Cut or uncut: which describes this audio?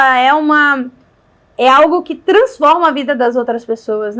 uncut